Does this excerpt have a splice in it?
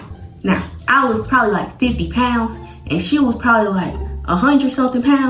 no; 0 cuts

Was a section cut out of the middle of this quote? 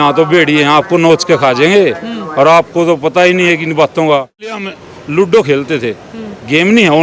yes; 1 cut; at 4.6 s

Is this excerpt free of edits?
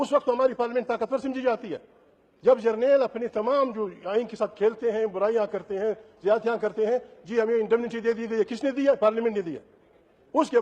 yes; 0 cuts

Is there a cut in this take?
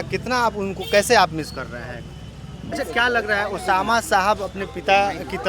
yes; 1 cut; at 2.7 s

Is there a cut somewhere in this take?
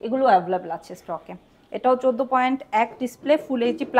no; 0 cuts

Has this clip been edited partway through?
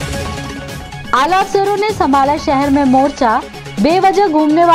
yes; 1 cut; at 1.0 s

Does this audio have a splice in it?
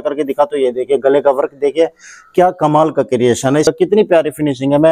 yes; 1 cut; at 3.7 s

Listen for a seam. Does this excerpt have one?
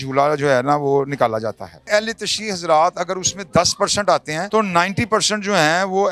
yes; 2 cuts; at 1.9 s, 4.4 s

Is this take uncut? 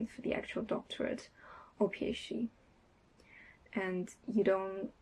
yes; 0 cuts

